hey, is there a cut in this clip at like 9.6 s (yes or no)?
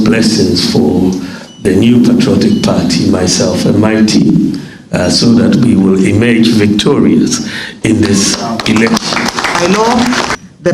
yes